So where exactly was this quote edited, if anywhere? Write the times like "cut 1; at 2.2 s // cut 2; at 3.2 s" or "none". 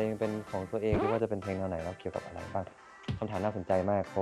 cut 1; at 1.0 s